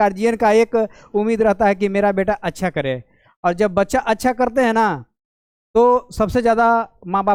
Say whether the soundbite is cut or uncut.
uncut